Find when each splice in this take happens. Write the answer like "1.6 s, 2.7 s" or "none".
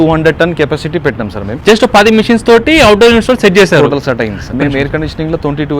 1.6 s, 4.5 s